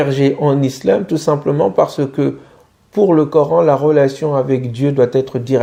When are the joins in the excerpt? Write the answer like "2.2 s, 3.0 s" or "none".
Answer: none